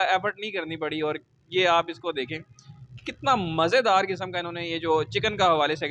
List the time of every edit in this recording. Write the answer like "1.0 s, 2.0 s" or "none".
none